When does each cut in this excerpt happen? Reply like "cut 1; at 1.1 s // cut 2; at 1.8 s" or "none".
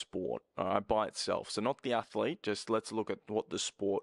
none